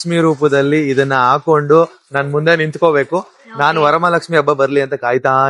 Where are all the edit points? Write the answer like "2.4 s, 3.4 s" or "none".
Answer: none